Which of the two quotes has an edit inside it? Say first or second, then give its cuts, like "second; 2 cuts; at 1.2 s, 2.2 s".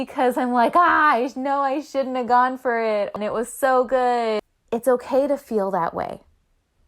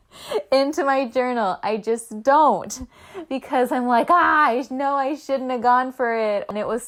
first; 1 cut; at 4.4 s